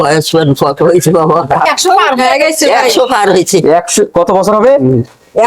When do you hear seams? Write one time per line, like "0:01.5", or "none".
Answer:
0:01.7